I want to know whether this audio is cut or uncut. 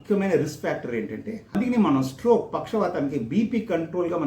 cut